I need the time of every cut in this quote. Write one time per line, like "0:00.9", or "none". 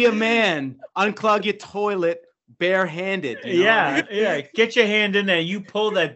0:04.1